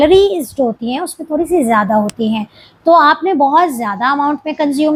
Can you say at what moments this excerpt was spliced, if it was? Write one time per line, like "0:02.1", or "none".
none